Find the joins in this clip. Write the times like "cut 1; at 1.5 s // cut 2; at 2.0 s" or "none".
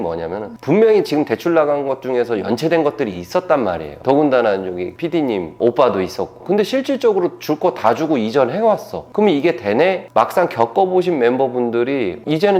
cut 1; at 6.4 s // cut 2; at 10.0 s